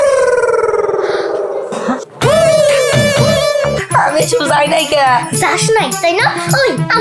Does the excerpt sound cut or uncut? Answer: cut